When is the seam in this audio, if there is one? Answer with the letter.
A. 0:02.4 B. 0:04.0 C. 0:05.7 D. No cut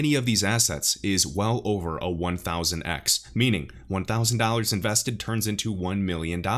D